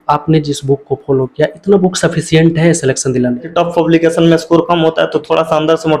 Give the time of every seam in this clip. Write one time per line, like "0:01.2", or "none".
0:03.5

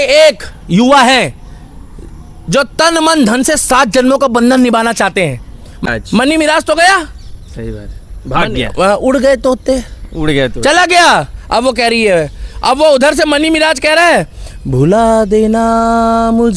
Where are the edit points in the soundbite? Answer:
0:05.9

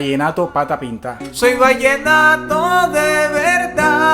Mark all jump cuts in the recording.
0:01.2

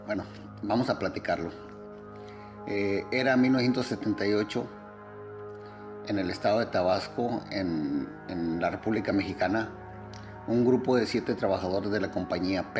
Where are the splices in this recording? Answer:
none

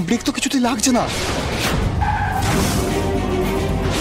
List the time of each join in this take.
0:01.6
0:02.7

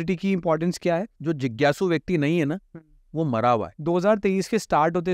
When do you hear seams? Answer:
0:01.1
0:03.7

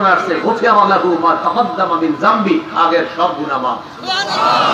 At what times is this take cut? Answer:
none

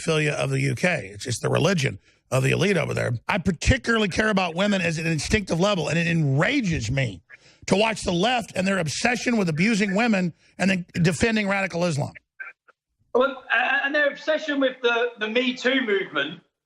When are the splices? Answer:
0:03.2

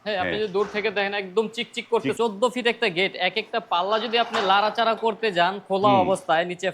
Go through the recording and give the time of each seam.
0:02.2

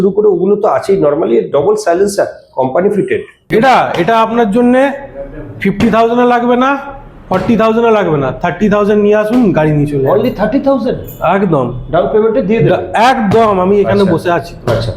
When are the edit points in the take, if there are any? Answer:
0:03.5

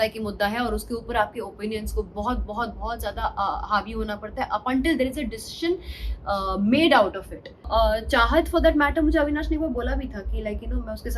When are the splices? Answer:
0:07.6

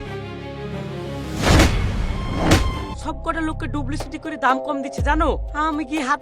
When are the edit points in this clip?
0:03.0

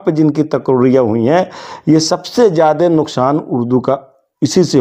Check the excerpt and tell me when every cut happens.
none

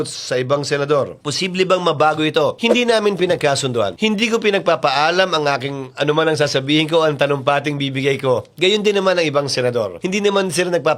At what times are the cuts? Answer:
none

